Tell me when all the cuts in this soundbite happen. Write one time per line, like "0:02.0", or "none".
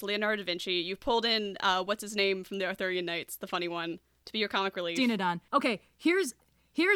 0:04.9